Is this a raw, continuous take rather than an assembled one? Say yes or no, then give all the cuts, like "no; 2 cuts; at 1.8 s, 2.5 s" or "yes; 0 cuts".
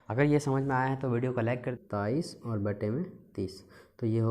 no; 1 cut; at 1.8 s